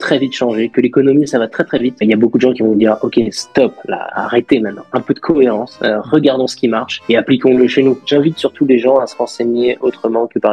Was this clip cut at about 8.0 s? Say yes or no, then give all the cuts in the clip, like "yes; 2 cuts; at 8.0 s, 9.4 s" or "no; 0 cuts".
yes; 2 cuts; at 2.0 s, 8.0 s